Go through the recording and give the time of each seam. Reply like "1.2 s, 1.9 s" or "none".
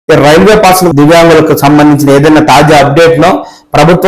0.9 s